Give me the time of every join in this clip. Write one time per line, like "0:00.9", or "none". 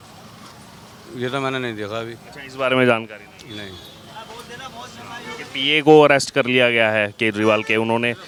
none